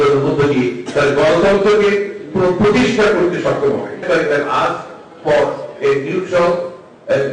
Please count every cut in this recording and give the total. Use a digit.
1